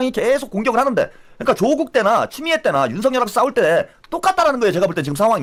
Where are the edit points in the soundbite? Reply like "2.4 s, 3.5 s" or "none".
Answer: none